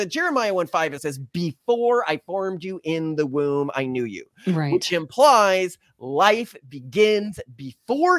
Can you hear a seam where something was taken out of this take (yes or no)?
yes